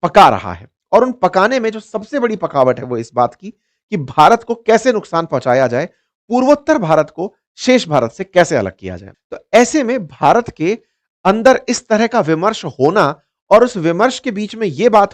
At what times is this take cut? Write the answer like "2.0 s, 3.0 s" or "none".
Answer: 9.0 s